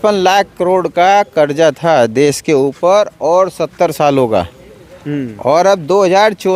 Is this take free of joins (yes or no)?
yes